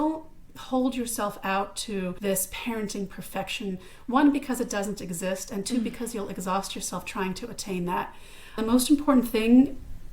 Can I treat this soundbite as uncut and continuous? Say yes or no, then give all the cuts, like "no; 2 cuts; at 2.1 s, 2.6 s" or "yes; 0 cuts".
no; 2 cuts; at 2.2 s, 8.6 s